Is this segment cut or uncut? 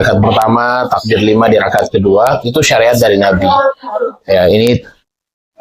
uncut